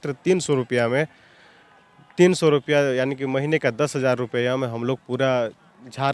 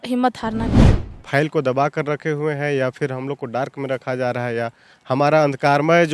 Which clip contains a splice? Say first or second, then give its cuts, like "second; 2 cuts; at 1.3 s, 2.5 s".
second; 1 cut; at 1.0 s